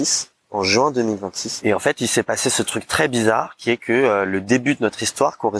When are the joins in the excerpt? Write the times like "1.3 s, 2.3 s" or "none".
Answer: 1.4 s